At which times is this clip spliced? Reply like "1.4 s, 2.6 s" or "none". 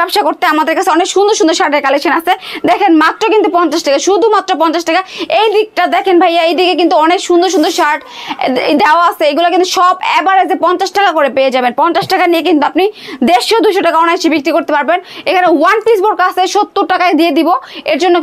none